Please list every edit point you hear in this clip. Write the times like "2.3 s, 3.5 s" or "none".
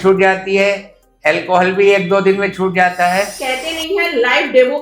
3.4 s